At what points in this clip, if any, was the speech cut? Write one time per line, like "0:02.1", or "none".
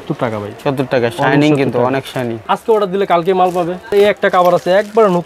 0:02.5
0:03.9